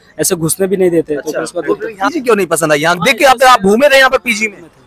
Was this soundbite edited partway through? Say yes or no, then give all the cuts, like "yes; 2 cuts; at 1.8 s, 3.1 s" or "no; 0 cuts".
yes; 1 cut; at 2.0 s